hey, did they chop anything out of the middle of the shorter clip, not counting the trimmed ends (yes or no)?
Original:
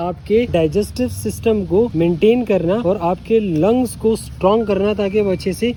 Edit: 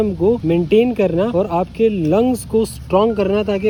no